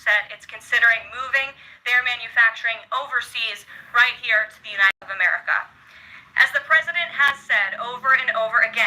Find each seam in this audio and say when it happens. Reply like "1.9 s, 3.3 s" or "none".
5.0 s